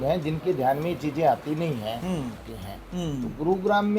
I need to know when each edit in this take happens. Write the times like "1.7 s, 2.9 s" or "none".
2.4 s